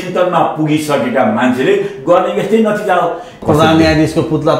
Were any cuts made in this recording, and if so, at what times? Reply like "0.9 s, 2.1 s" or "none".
3.4 s